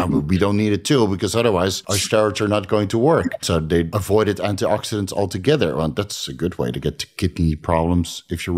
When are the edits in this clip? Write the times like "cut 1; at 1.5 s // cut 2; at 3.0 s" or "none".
cut 1; at 1.9 s // cut 2; at 3.9 s